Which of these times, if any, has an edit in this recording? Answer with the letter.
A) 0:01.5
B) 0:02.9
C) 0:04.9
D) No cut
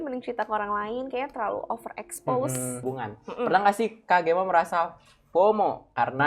B